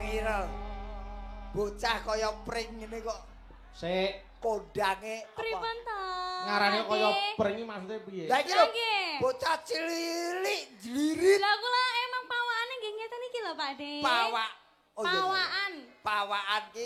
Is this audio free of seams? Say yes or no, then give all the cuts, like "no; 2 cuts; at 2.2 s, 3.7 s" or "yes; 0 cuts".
yes; 0 cuts